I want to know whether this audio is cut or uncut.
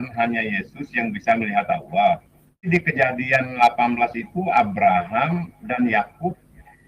cut